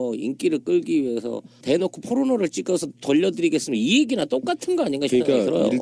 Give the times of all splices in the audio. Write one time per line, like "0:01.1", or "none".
0:03.7